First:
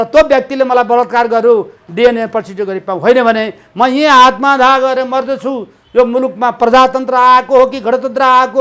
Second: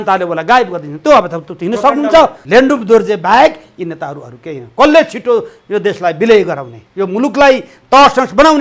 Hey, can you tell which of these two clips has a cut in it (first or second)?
second